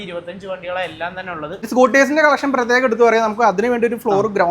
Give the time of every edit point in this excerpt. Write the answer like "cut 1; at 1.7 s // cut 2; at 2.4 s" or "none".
cut 1; at 1.7 s